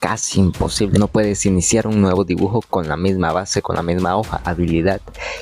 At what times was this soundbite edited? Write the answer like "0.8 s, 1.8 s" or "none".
0.9 s, 4.5 s